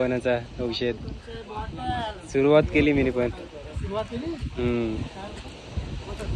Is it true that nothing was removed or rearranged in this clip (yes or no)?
yes